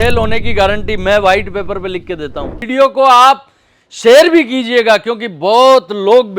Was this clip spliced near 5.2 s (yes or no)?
no